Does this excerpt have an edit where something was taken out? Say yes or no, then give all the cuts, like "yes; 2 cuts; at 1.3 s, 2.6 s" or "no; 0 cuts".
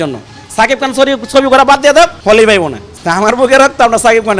yes; 2 cuts; at 2.2 s, 2.8 s